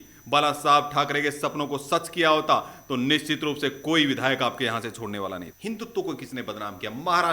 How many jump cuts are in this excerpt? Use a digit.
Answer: 1